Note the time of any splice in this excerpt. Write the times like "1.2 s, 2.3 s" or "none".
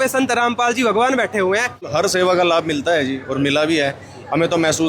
2.1 s